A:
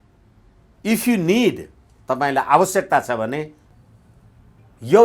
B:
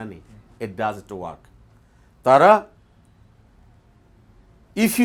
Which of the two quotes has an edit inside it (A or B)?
A